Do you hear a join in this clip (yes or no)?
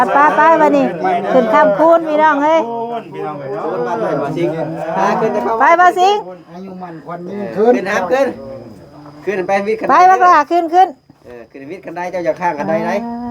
no